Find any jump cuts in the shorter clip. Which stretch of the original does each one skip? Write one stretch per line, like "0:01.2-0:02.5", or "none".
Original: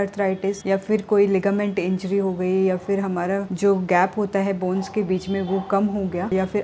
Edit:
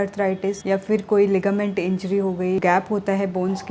0:02.6-0:03.9